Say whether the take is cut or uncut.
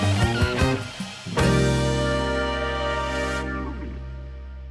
uncut